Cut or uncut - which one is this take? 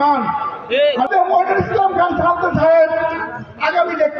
cut